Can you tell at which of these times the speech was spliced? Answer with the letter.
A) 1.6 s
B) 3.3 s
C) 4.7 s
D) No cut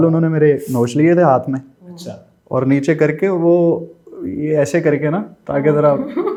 D